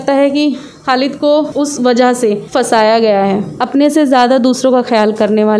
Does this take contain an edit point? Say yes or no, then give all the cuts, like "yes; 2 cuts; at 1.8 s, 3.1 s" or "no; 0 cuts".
yes; 3 cuts; at 1.5 s, 2.4 s, 3.5 s